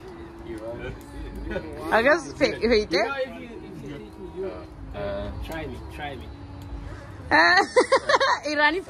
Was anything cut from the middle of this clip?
no; 0 cuts

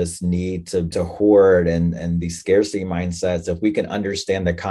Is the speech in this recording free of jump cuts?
no; 1 cut; at 0.9 s

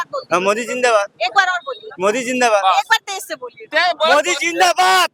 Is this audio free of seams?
yes; 0 cuts

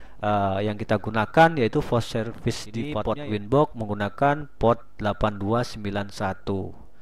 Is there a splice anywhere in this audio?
yes; 1 cut; at 2.9 s

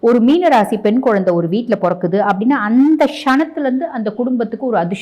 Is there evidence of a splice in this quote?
no; 0 cuts

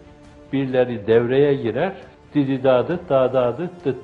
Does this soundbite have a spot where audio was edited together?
yes; 1 cut; at 2.1 s

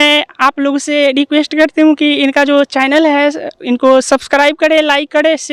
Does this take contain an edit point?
no; 0 cuts

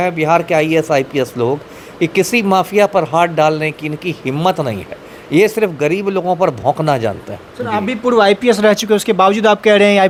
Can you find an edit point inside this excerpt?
no; 0 cuts

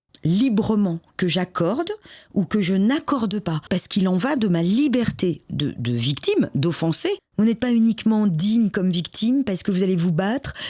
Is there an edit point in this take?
yes; 2 cuts; at 3.6 s, 7.2 s

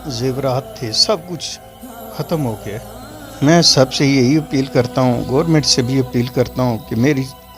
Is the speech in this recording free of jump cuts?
no; 1 cut; at 3.2 s

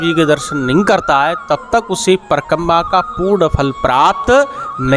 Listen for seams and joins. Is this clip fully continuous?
yes; 0 cuts

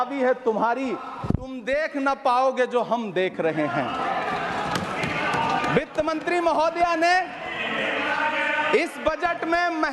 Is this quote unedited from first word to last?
yes; 0 cuts

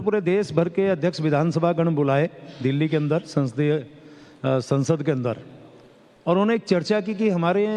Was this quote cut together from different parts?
no; 0 cuts

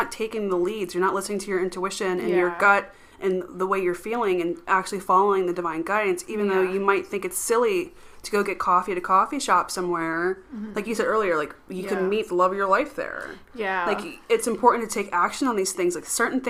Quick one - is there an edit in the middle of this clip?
no; 0 cuts

